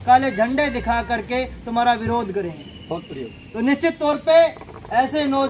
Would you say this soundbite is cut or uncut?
uncut